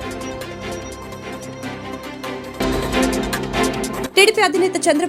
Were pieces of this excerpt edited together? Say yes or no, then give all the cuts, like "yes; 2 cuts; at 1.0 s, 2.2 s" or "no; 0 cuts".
yes; 2 cuts; at 2.6 s, 4.1 s